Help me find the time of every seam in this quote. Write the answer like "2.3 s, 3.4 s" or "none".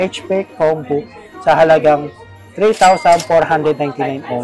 none